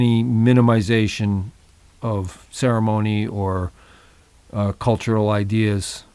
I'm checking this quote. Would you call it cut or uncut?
uncut